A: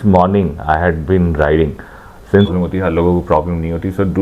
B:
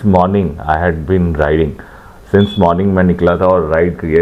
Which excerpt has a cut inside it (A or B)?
A